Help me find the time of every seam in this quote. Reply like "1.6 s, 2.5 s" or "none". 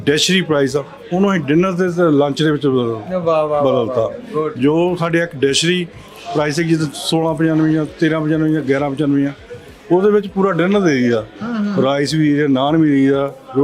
none